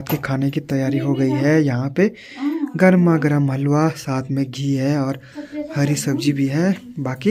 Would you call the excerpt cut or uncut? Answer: uncut